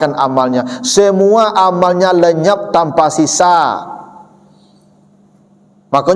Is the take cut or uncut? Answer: uncut